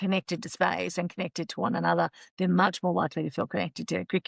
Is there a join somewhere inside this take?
no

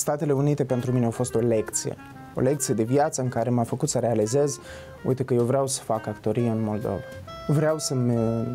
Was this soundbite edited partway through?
no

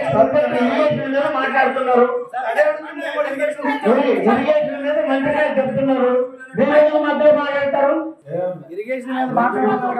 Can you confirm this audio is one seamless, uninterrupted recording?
no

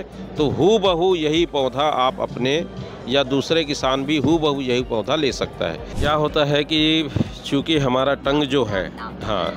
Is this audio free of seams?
no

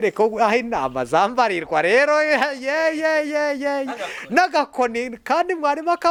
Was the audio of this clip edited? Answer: no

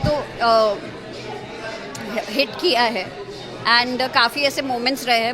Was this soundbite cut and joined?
no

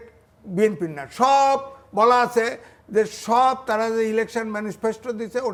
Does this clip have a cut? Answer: no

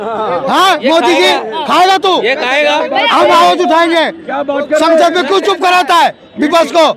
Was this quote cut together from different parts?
no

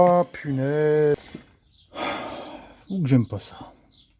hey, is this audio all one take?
no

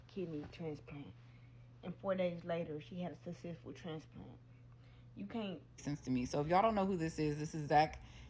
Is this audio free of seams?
no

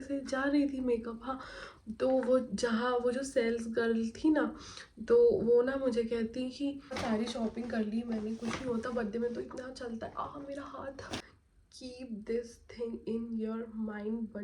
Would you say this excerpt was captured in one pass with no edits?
no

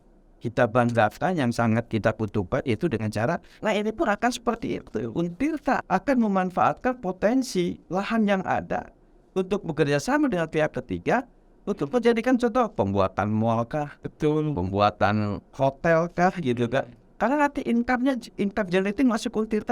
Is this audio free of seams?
no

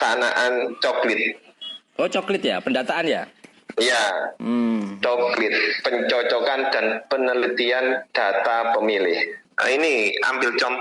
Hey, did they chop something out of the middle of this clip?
yes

